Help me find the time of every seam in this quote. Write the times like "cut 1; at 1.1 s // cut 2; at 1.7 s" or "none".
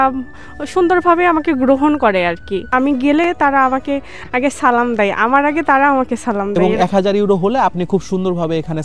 cut 1; at 2.7 s // cut 2; at 6.6 s